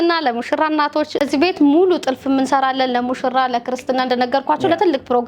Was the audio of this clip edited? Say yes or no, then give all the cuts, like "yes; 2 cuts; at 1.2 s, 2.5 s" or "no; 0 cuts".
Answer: yes; 1 cut; at 1.2 s